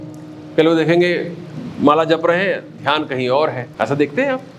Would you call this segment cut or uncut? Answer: cut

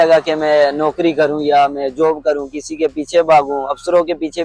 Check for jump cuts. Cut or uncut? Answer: uncut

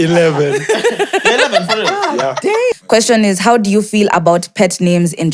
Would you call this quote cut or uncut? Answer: cut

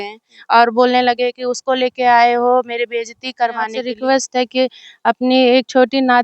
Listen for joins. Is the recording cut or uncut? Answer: cut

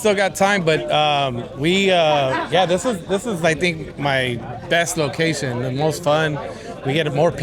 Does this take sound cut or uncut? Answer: uncut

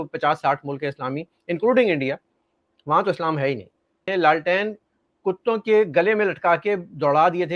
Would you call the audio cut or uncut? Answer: cut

